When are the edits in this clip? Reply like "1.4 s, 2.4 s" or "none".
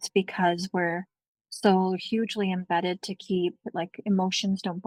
none